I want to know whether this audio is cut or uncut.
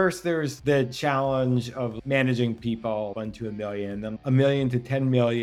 uncut